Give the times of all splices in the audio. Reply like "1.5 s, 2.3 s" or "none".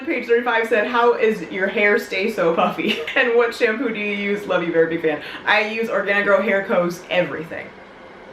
none